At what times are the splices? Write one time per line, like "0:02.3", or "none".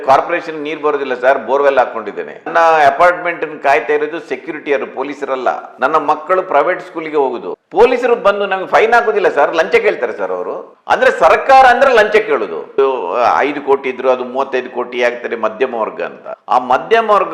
0:07.5
0:12.8
0:16.3